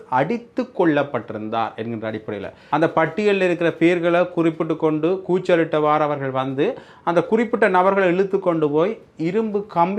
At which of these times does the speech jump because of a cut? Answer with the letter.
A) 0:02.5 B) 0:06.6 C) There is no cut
A